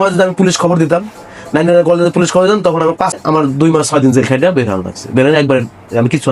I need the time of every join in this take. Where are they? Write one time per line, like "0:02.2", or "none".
0:03.1